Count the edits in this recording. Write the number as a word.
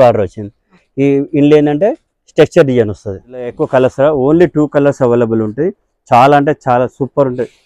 one